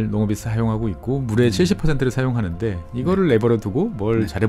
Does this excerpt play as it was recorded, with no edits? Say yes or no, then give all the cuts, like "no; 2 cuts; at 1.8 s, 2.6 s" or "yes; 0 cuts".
yes; 0 cuts